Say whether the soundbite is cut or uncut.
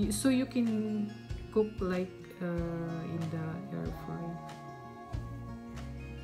cut